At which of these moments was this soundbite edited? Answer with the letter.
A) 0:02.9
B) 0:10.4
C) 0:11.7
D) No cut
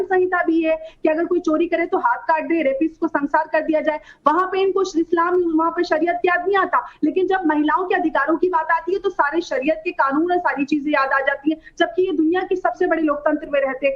D